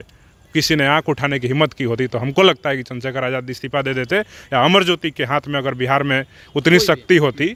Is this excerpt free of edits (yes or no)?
yes